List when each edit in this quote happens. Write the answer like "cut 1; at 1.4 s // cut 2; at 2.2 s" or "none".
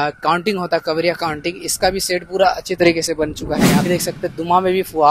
cut 1; at 3.9 s

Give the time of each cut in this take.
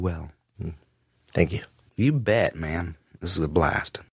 none

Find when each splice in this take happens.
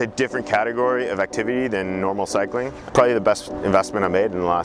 cut 1; at 2.9 s

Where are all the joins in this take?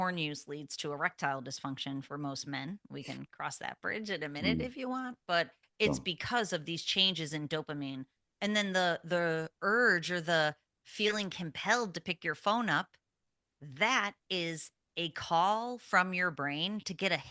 none

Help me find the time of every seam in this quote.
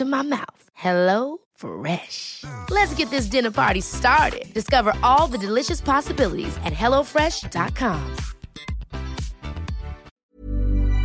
cut 1; at 10.1 s

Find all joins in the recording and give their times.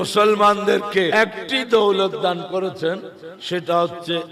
cut 1; at 1.1 s

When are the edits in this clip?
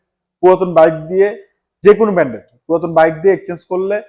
none

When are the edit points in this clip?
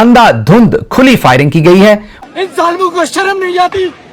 cut 1; at 2.1 s

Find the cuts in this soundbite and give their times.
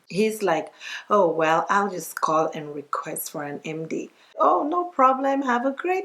cut 1; at 4.3 s

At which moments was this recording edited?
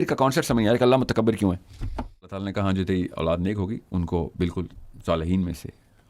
cut 1; at 2.5 s

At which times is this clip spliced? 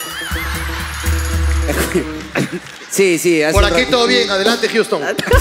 none

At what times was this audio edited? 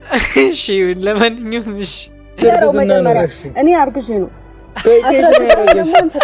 cut 1; at 2.2 s

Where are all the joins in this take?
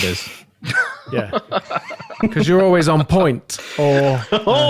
none

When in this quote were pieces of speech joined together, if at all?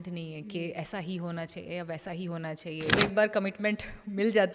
cut 1; at 3.0 s

